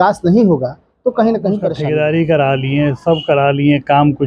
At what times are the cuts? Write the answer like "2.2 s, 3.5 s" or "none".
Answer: 1.8 s